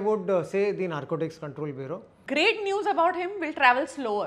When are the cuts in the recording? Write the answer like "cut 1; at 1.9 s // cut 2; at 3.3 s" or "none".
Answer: cut 1; at 2.1 s